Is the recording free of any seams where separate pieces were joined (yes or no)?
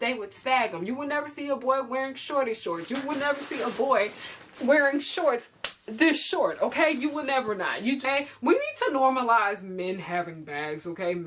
no